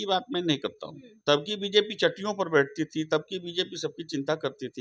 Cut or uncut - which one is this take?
uncut